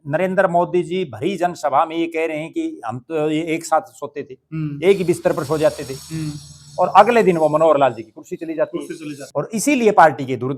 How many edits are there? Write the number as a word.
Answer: one